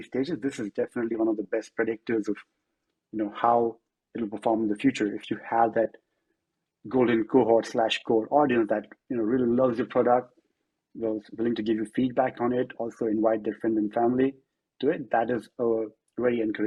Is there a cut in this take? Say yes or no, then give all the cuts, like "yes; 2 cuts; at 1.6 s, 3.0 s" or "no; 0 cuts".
no; 0 cuts